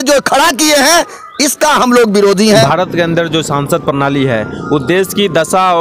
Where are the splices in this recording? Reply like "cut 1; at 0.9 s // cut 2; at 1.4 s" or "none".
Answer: cut 1; at 2.7 s